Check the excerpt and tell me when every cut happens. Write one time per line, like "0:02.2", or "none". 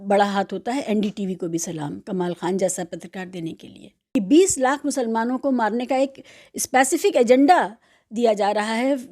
0:04.0